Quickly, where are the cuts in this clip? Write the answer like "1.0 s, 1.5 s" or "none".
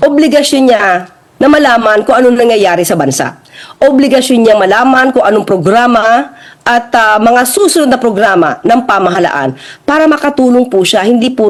none